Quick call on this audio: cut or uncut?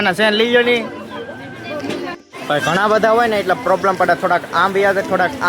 cut